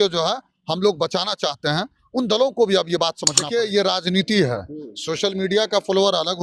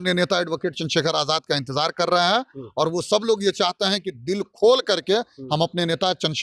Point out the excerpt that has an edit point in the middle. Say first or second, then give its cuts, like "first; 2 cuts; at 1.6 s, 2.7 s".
first; 1 cut; at 3.3 s